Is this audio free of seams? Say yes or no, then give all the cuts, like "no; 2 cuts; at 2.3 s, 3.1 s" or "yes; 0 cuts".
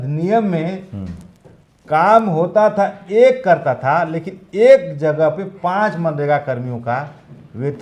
yes; 0 cuts